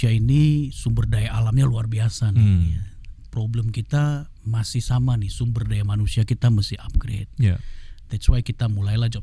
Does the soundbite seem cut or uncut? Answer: uncut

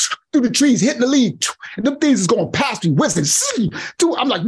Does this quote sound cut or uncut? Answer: uncut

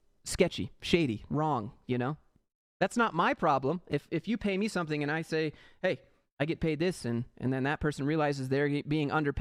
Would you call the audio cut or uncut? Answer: uncut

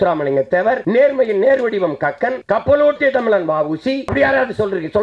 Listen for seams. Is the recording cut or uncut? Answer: cut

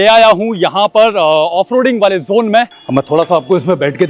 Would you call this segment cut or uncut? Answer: cut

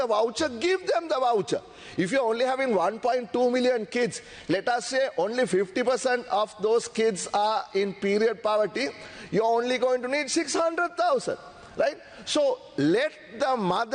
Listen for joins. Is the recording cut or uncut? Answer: uncut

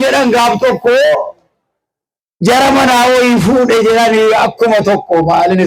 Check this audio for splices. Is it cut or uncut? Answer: uncut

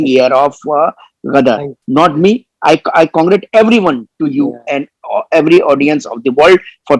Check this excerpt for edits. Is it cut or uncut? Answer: uncut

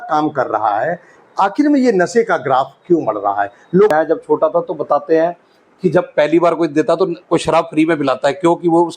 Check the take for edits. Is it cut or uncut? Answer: cut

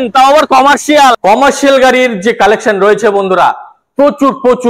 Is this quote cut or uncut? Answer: cut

